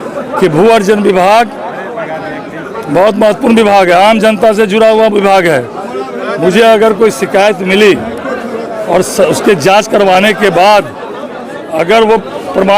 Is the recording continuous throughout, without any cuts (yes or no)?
yes